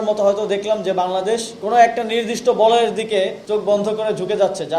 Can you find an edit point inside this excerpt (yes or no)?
yes